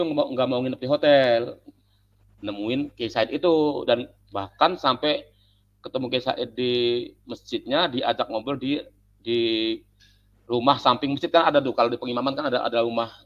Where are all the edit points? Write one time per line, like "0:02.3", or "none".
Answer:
none

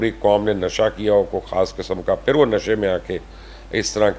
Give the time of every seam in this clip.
none

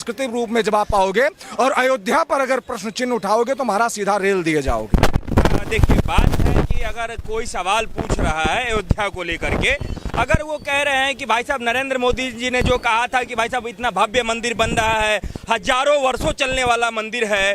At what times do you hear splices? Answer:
none

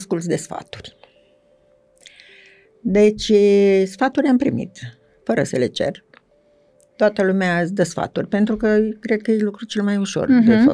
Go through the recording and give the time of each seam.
none

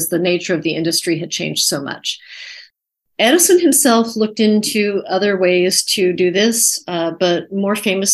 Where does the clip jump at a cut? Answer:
0:02.8

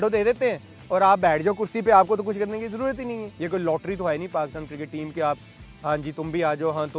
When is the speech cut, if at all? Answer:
0:03.3

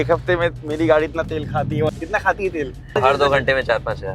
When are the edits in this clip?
0:01.9
0:03.0

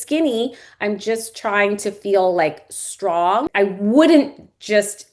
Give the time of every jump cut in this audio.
0:03.4

